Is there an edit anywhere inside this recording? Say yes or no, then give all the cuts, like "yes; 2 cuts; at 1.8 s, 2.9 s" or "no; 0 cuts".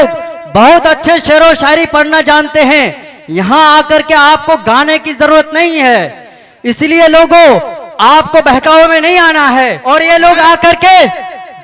yes; 1 cut; at 9.8 s